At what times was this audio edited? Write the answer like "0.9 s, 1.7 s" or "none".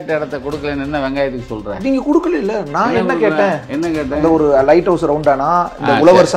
none